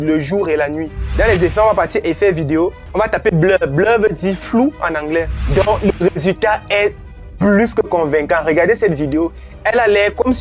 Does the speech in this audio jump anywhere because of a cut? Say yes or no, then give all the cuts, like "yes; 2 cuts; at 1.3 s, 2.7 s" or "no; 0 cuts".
yes; 3 cuts; at 1.0 s, 5.4 s, 9.5 s